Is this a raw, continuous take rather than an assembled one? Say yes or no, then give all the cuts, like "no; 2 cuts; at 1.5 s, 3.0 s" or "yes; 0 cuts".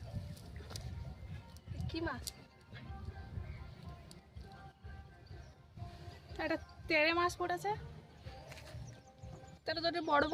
yes; 0 cuts